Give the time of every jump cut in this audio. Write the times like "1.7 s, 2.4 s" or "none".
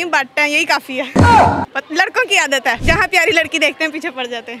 1.6 s, 2.8 s